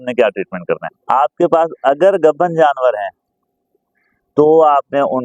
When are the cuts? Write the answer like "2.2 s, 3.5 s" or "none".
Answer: 0.9 s